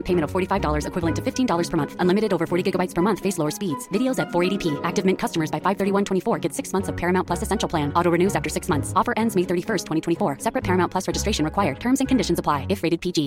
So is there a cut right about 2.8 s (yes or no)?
no